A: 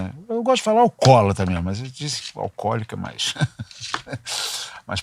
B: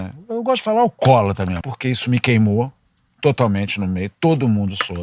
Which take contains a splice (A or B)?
B